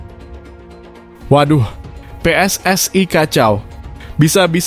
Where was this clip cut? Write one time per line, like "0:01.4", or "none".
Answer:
0:01.3